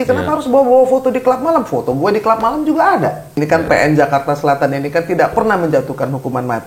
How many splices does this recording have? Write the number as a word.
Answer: one